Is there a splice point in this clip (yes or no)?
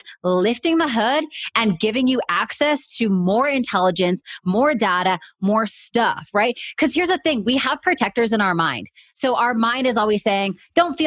no